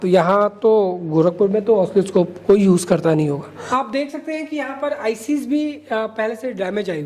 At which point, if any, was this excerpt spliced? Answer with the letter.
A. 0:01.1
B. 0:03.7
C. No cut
B